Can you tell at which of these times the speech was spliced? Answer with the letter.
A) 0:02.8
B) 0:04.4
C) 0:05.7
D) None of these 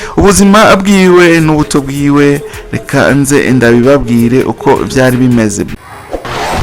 C